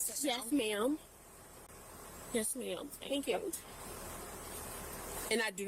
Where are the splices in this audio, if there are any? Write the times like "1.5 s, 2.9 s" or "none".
2.8 s